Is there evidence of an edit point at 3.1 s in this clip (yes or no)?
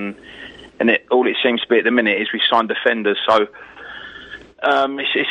no